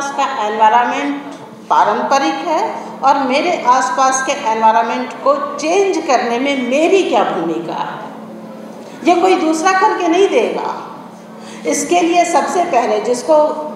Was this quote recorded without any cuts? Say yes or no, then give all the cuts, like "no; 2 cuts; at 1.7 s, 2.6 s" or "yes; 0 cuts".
yes; 0 cuts